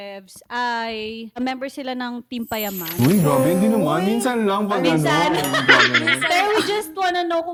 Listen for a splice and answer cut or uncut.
uncut